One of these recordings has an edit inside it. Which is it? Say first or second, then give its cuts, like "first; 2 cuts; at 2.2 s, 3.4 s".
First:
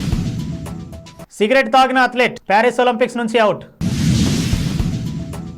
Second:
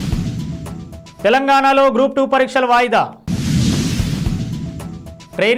first; 1 cut; at 1.1 s